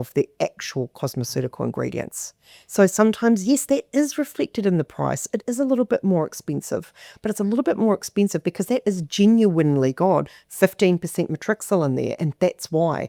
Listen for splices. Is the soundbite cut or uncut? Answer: uncut